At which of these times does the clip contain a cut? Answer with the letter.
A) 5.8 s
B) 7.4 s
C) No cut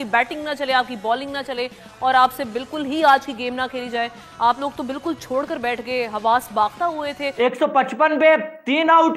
B